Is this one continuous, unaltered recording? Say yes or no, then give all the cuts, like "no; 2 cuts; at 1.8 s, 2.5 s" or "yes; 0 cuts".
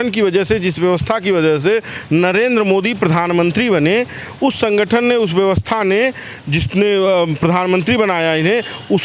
yes; 0 cuts